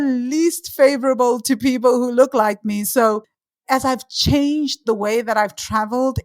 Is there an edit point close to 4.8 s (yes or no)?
no